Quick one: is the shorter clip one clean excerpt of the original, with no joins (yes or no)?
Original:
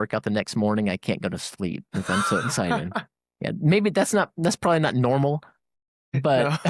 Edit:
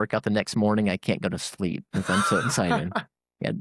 yes